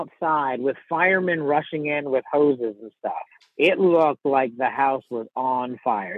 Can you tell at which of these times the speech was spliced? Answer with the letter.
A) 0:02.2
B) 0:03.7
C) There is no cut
C